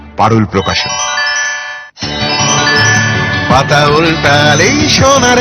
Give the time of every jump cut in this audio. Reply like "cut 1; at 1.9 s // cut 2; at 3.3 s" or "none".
cut 1; at 1.6 s